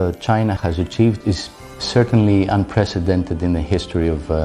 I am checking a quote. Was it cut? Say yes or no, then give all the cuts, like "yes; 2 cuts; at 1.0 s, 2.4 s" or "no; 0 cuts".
no; 0 cuts